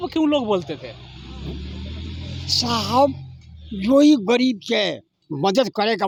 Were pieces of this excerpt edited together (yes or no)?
no